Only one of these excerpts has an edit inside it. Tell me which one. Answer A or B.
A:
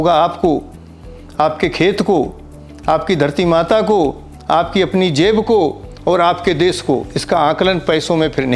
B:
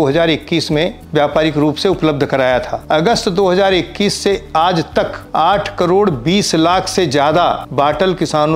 B